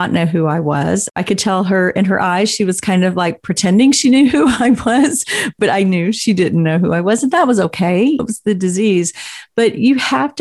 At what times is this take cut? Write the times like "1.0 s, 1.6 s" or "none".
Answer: 1.1 s, 5.5 s, 8.2 s

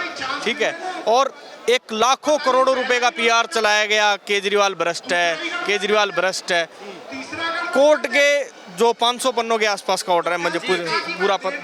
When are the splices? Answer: none

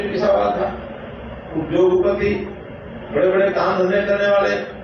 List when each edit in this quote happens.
none

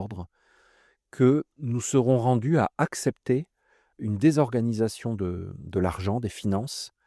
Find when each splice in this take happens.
1.6 s, 4.0 s

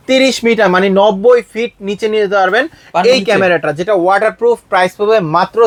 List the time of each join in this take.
none

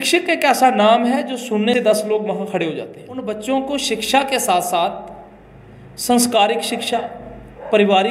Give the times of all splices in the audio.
1.7 s, 3.2 s

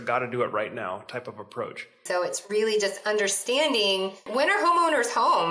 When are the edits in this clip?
2.0 s, 4.3 s

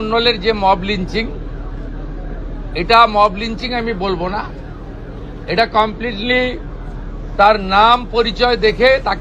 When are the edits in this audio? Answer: none

